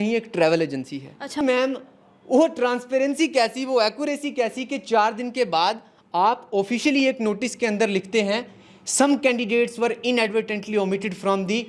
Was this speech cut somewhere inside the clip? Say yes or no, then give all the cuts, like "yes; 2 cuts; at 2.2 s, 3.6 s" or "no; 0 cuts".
yes; 1 cut; at 1.4 s